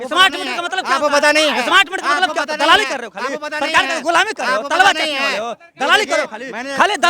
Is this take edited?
no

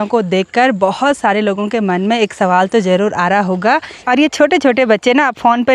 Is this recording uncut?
no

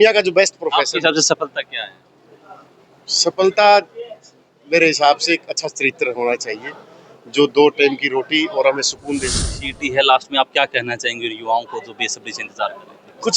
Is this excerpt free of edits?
no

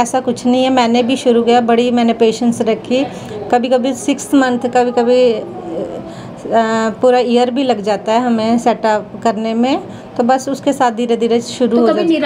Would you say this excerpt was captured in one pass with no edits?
yes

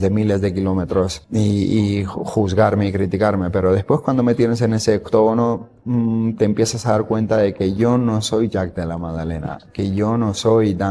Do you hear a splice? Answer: yes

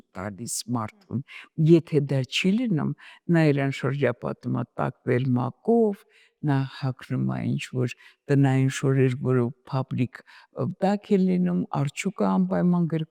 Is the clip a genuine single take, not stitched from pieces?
yes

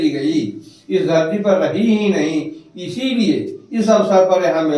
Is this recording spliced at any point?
no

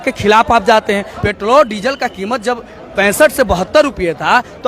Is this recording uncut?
no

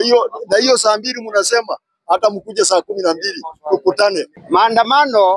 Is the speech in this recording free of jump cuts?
no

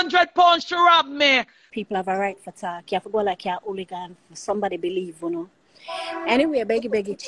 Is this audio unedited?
no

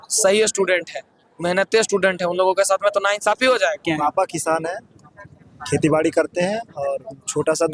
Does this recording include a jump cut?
yes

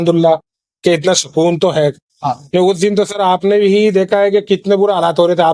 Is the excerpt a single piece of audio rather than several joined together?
yes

